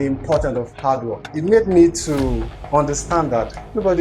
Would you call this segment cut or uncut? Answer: cut